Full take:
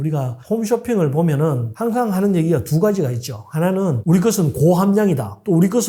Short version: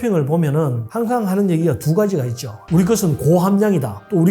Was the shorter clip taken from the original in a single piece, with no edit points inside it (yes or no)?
no